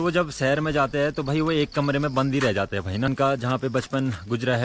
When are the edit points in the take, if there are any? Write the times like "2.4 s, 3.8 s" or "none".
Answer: 3.1 s